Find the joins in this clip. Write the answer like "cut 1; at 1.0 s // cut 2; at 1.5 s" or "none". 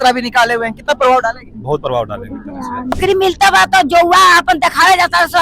cut 1; at 3.0 s